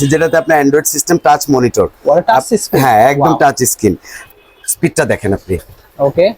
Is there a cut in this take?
yes; 1 cut; at 4.1 s

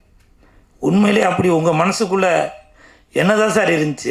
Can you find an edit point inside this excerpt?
no; 0 cuts

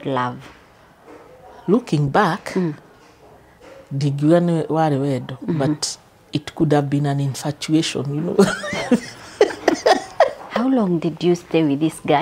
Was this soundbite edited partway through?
yes; 1 cut; at 10.4 s

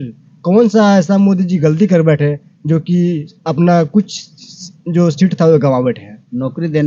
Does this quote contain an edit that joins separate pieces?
no; 0 cuts

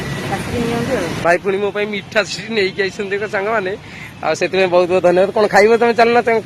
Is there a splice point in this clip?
yes; 1 cut; at 1.2 s

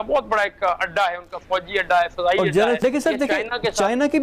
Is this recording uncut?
no; 1 cut; at 2.8 s

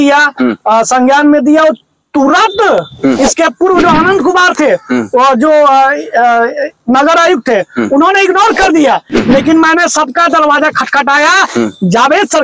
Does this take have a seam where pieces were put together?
no; 0 cuts

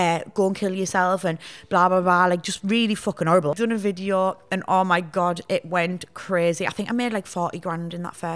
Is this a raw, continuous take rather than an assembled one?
no; 1 cut; at 3.5 s

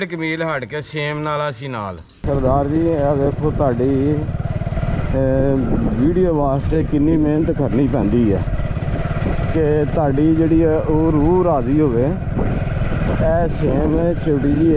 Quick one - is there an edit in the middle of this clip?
yes; 1 cut; at 2.2 s

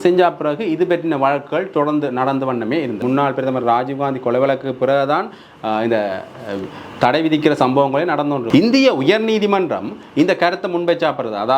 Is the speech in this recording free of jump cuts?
no; 2 cuts; at 3.0 s, 8.4 s

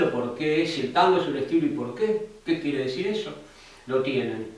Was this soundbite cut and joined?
no; 0 cuts

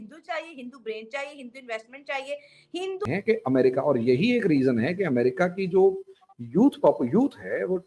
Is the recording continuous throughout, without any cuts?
no; 1 cut; at 3.1 s

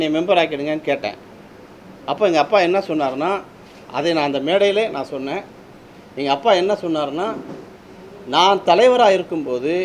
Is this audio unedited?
yes; 0 cuts

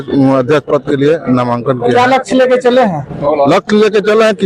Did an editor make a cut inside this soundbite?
no; 0 cuts

